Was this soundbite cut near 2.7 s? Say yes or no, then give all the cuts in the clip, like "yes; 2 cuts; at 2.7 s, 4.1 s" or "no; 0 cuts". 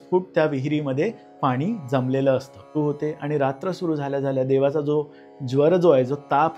yes; 1 cut; at 2.7 s